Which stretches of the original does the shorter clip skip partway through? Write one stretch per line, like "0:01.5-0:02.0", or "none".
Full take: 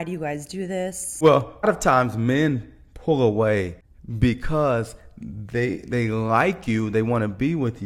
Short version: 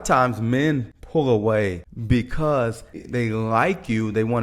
0:02.7-0:02.9
0:03.8-0:04.0
0:05.1-0:05.8